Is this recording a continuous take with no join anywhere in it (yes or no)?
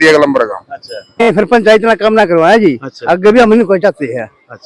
no